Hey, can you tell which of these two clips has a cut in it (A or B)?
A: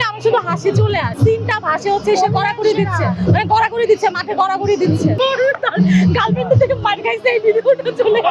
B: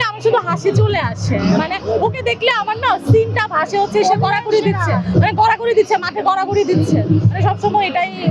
A